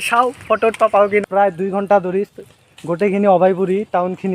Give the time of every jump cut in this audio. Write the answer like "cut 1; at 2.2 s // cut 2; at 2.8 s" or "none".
cut 1; at 1.2 s